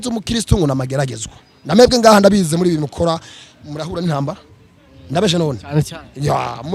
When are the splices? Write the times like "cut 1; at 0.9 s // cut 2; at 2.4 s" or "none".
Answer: none